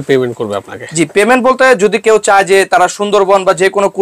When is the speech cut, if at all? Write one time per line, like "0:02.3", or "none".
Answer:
none